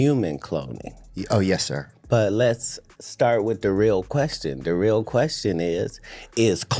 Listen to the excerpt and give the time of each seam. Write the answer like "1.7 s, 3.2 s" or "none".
none